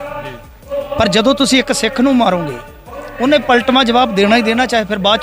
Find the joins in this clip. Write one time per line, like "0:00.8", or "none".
none